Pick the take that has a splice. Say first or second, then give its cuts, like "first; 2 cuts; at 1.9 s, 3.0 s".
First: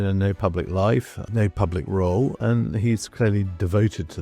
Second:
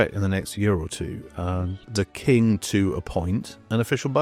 first; 2 cuts; at 1.2 s, 2.4 s